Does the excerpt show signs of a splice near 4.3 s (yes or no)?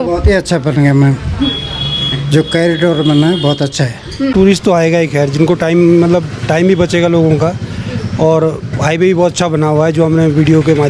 yes